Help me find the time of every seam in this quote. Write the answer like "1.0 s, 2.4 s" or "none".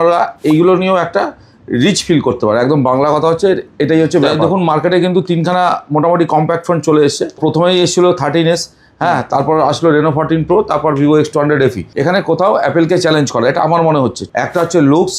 4.4 s, 7.4 s, 11.9 s, 14.2 s